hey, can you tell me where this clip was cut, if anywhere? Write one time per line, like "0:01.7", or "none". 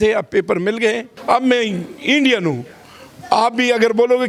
0:01.1